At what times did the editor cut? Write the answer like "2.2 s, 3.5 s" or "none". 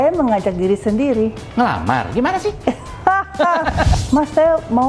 3.9 s